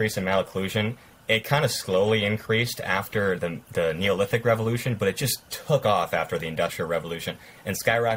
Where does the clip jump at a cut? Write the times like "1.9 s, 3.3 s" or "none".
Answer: none